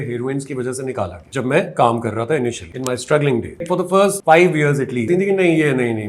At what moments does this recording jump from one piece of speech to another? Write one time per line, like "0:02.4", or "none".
0:01.2
0:02.7
0:04.0
0:05.1